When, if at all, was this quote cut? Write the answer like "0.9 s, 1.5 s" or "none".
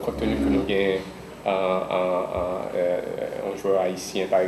none